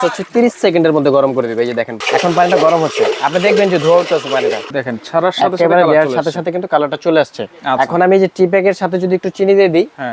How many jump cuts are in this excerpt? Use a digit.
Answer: 2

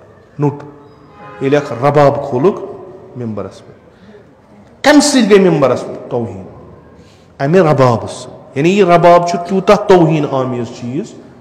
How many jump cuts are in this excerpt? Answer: 0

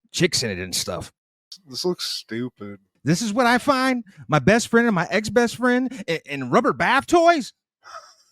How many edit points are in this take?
1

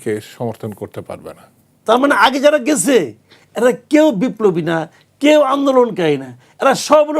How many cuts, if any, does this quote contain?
1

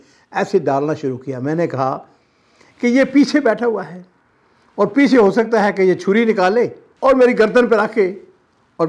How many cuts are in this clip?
0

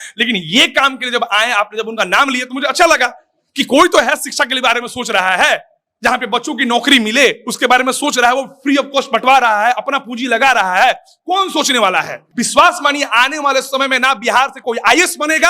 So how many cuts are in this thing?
1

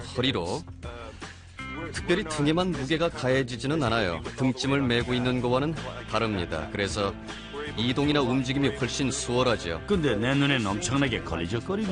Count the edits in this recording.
1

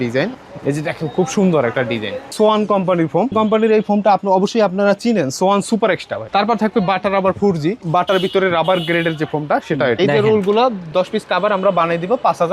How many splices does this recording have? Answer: 5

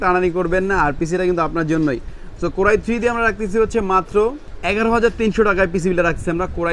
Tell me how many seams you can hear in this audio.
0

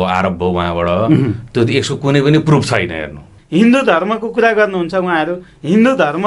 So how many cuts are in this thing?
1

